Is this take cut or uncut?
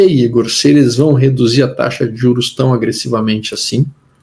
uncut